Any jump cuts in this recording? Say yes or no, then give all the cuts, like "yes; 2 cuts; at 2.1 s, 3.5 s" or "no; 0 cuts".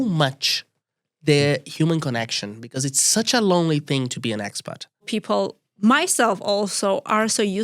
yes; 1 cut; at 5.1 s